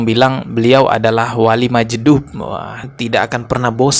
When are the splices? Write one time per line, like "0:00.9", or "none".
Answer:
0:02.8